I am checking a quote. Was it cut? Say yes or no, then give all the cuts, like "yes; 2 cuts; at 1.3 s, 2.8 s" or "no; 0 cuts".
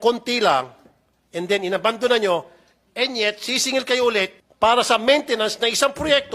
yes; 1 cut; at 4.4 s